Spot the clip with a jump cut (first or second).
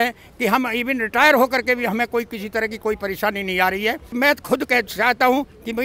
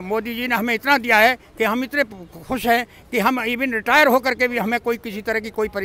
first